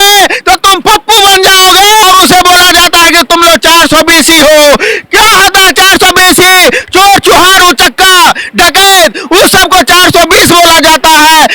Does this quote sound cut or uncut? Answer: cut